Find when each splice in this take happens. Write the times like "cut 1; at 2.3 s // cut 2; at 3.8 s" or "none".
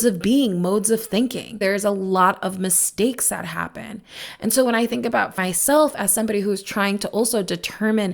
cut 1; at 1.6 s // cut 2; at 5.4 s